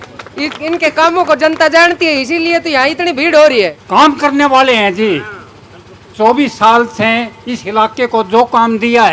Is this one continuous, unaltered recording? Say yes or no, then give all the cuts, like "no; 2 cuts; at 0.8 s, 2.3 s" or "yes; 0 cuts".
no; 1 cut; at 3.8 s